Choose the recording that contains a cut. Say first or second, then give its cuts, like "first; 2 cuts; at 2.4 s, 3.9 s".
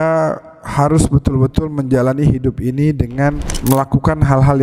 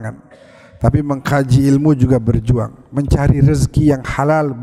first; 1 cut; at 3.5 s